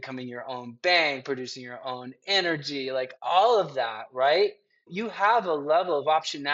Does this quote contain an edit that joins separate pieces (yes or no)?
yes